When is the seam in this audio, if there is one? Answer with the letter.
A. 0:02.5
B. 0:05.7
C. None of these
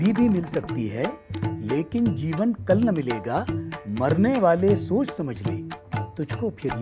C